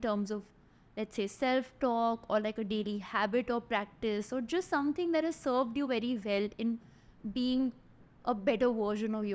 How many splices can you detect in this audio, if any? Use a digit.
0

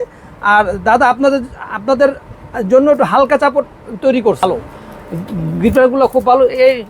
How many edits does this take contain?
1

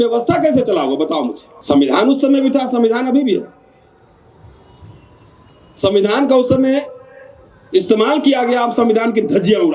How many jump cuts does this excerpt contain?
1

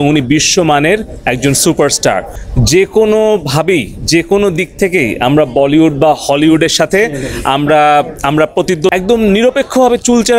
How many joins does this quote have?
2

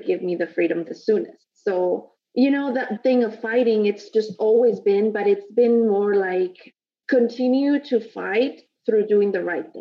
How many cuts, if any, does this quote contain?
1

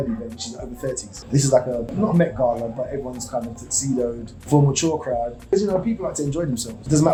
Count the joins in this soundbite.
0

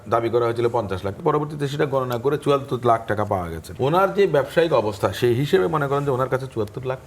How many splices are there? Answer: 2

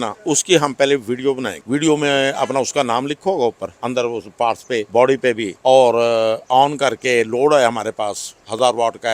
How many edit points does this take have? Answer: 4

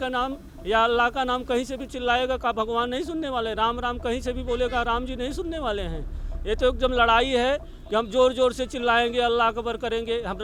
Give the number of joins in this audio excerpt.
0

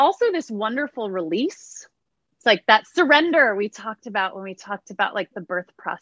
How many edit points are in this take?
0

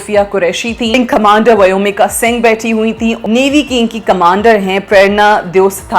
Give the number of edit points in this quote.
2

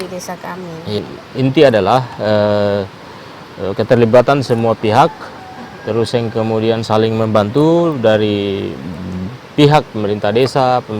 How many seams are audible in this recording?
1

